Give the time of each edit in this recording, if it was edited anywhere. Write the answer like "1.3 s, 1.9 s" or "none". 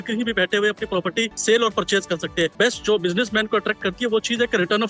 1.3 s, 2.5 s